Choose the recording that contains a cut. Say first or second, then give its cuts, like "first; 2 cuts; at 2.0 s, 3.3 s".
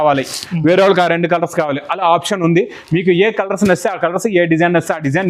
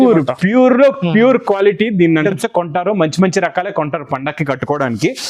second; 1 cut; at 2.2 s